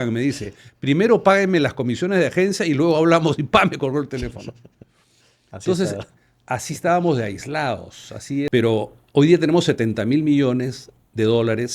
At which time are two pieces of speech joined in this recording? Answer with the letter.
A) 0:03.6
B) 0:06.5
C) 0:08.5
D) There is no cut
C